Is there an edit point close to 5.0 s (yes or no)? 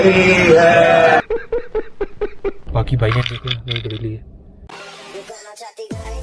no